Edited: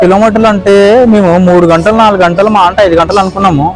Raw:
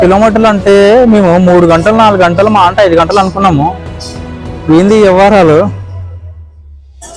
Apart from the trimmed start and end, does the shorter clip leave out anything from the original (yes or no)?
no